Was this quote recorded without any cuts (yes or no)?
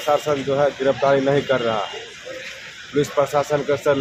yes